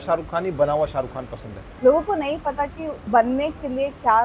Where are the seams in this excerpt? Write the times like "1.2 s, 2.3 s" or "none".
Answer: 1.6 s, 2.9 s